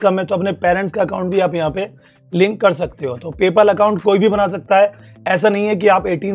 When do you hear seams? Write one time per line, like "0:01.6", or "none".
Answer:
none